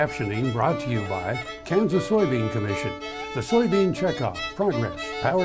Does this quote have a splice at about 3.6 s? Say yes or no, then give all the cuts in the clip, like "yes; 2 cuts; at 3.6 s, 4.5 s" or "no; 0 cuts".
no; 0 cuts